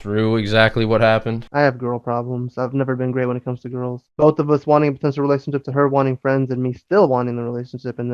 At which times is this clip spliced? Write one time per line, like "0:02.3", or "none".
0:01.4
0:04.0